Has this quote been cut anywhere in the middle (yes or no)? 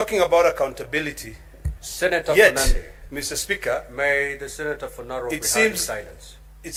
no